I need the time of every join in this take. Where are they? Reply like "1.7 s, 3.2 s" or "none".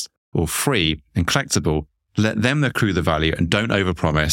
none

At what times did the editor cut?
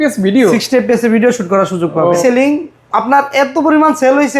2.2 s

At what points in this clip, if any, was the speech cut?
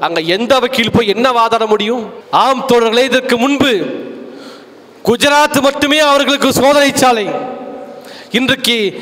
2.1 s

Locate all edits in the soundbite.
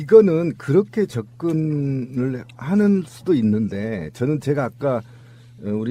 none

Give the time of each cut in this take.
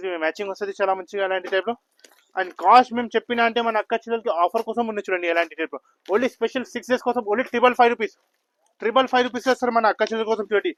none

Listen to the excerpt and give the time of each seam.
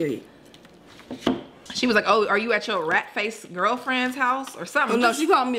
1.6 s

